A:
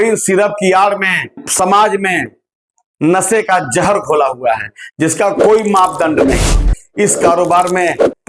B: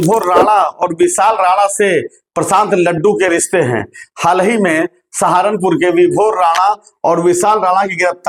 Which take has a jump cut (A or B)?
A